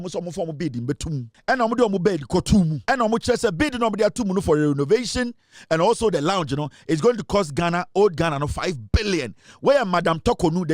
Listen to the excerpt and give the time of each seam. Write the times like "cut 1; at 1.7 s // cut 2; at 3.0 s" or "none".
cut 1; at 1.3 s // cut 2; at 2.8 s